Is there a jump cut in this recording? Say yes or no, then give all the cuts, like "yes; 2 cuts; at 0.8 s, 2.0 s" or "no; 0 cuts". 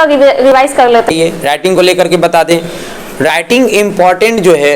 yes; 1 cut; at 1.1 s